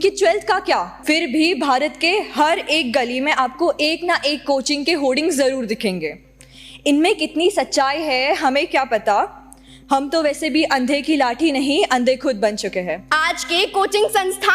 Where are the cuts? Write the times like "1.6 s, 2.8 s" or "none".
0.9 s, 13.0 s